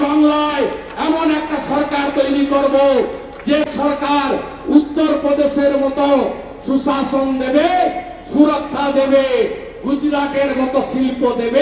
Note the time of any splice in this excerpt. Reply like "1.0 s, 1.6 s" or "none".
none

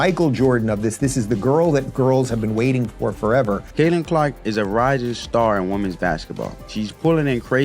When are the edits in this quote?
3.6 s, 6.6 s

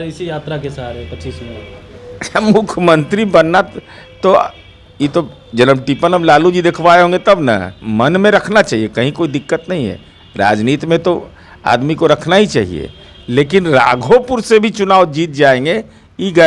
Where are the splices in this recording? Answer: 7.8 s

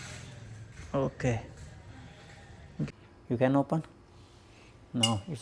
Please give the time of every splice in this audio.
2.9 s

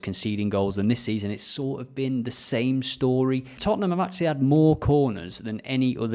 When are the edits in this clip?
3.6 s

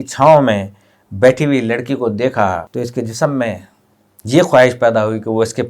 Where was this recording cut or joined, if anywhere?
2.7 s

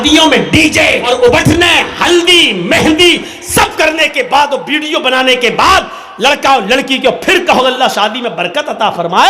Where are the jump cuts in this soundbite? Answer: 1.0 s

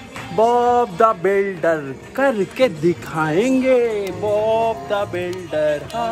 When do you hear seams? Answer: none

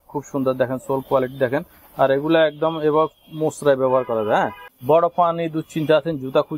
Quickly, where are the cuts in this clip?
4.6 s

